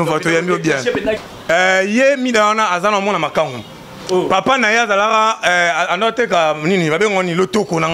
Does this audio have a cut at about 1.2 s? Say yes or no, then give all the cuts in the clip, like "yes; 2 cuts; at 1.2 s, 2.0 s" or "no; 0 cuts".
yes; 1 cut; at 1.2 s